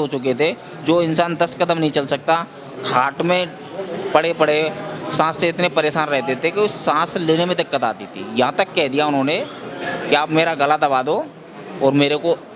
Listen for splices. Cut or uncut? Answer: uncut